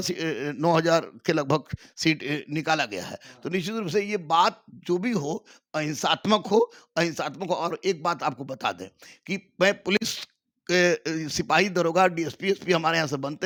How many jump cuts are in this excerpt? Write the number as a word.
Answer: zero